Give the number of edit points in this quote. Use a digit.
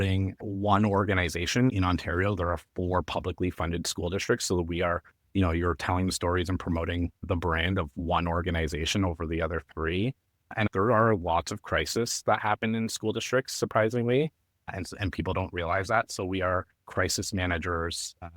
2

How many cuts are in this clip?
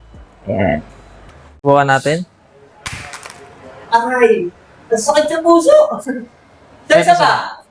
1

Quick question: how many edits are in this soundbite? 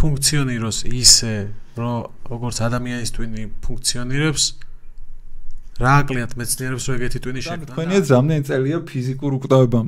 1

